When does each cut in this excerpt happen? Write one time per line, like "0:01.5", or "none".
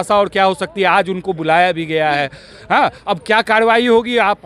none